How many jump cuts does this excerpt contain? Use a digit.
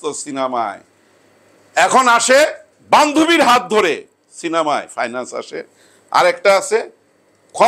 1